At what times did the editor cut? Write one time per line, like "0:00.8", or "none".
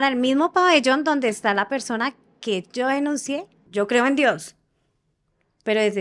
0:03.6